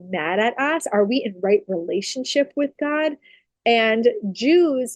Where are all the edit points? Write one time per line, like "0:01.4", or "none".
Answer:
none